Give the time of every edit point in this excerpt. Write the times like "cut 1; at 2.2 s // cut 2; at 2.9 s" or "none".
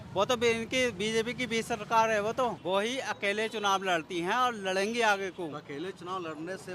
cut 1; at 2.6 s